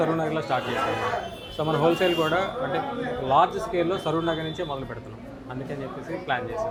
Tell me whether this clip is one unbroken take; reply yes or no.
yes